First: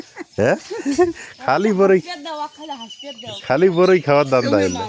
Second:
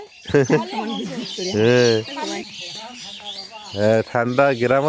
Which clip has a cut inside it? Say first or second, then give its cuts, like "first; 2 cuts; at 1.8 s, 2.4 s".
second; 1 cut; at 2.4 s